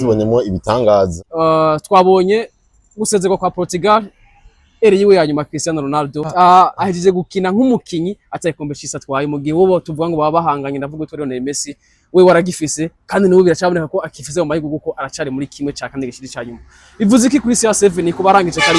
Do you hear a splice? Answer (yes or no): yes